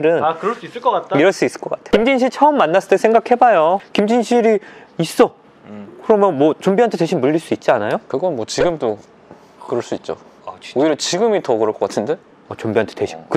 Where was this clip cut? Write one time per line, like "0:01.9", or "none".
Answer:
none